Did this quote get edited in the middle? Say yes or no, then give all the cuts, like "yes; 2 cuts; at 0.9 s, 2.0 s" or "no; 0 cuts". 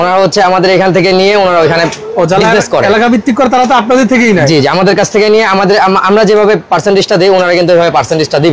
no; 0 cuts